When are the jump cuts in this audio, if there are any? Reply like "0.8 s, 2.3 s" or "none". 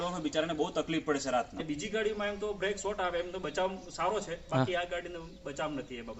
1.5 s